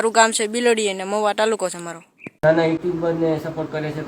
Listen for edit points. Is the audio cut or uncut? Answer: cut